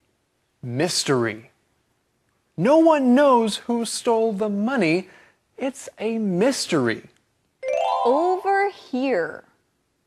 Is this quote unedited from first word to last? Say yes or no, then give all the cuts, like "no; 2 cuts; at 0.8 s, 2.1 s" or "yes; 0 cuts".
no; 1 cut; at 6.3 s